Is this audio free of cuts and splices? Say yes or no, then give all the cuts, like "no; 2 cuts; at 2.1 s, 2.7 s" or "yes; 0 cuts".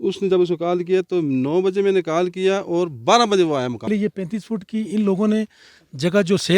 no; 1 cut; at 3.9 s